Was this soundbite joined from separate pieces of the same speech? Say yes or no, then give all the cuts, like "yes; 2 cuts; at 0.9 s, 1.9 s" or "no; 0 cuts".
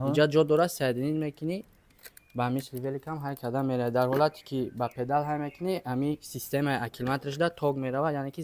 no; 0 cuts